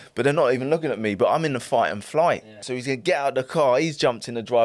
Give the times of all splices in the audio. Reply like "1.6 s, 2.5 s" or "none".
2.6 s